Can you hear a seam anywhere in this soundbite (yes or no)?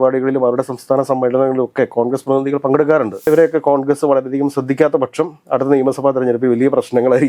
yes